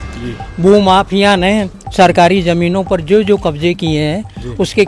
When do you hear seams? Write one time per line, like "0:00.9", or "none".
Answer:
none